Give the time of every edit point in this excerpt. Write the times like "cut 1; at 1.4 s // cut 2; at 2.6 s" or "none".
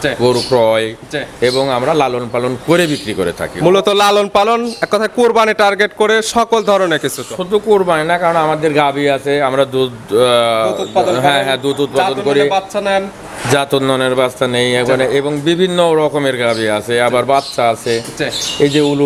none